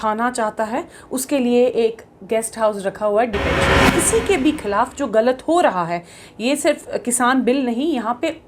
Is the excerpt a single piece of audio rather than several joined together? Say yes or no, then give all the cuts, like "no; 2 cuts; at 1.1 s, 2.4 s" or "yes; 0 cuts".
no; 1 cut; at 3.8 s